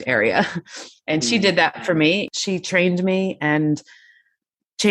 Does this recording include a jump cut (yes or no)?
yes